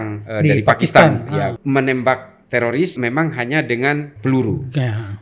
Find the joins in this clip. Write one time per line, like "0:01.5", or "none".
0:01.6
0:03.0
0:04.1